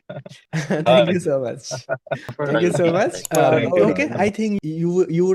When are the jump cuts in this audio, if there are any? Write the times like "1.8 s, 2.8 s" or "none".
3.9 s